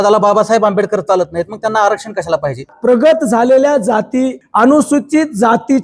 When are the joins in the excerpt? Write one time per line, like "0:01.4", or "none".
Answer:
0:02.7
0:04.4